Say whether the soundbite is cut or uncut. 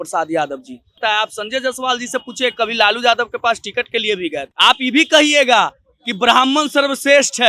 cut